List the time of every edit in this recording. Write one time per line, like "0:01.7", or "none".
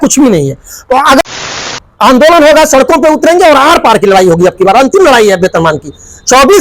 0:01.2